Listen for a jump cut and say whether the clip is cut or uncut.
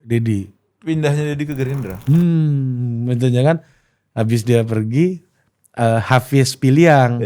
cut